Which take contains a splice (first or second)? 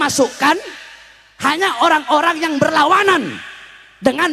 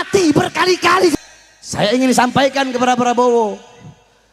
second